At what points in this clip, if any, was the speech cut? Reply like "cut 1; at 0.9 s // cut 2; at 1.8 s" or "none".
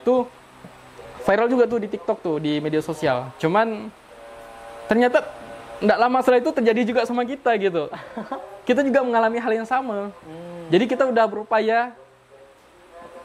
none